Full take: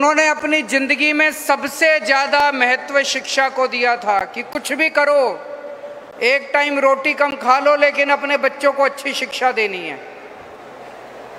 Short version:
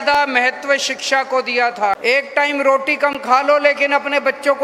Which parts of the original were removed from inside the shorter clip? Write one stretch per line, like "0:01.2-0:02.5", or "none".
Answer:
0:04.3-0:06.2